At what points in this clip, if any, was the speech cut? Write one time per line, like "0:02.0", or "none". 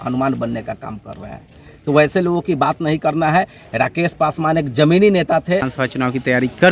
0:05.7